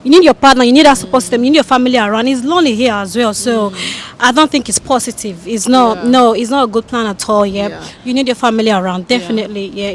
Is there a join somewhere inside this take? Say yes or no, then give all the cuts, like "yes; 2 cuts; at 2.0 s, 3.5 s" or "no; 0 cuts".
no; 0 cuts